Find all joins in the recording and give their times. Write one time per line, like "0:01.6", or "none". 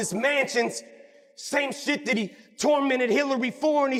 none